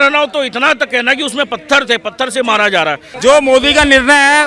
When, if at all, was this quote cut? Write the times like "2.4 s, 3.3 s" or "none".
3.1 s